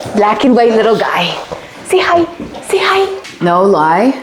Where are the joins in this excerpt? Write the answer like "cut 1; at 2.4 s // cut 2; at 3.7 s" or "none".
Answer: cut 1; at 3.3 s